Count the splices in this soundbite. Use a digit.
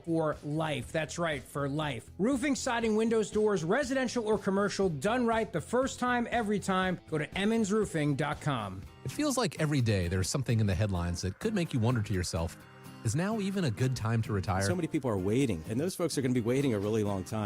1